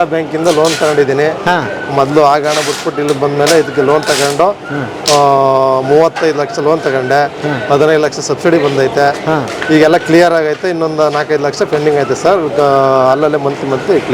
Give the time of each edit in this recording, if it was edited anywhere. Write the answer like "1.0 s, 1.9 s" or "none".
none